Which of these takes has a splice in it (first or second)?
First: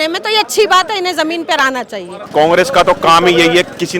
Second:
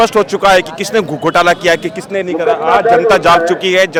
first